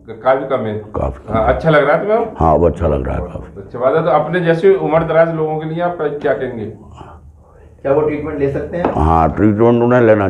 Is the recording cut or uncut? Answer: uncut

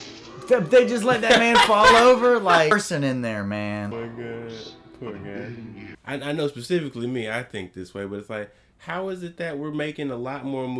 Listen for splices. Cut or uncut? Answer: cut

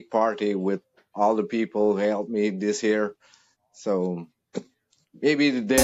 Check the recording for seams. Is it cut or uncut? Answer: uncut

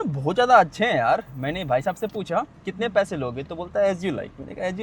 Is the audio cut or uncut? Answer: cut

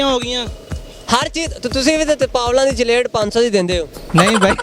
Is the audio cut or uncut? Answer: uncut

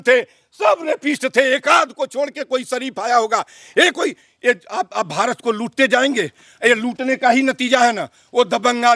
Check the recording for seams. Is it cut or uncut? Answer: uncut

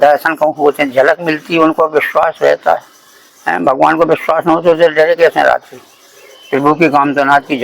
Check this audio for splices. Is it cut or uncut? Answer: uncut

